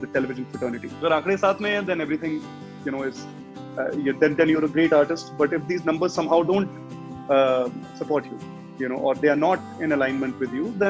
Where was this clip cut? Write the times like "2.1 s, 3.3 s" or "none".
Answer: 1.0 s